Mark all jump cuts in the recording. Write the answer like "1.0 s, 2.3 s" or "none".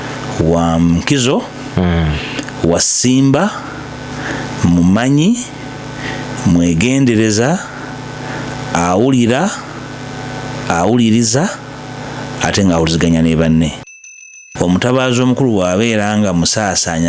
14.0 s

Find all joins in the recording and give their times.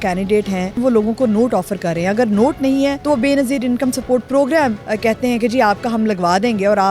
0.8 s, 3.0 s, 4.8 s

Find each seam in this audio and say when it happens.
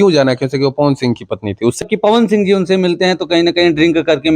1.9 s

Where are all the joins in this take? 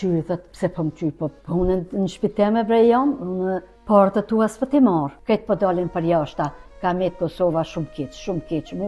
1.4 s, 3.7 s, 5.1 s

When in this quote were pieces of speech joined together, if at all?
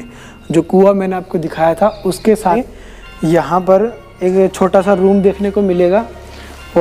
2.6 s

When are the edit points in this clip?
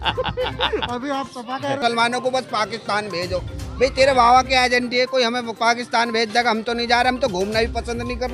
1.8 s

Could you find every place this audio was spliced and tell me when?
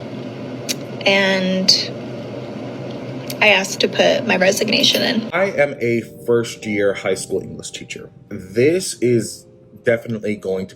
5.3 s

